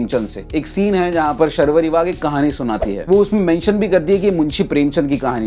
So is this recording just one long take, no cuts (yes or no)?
yes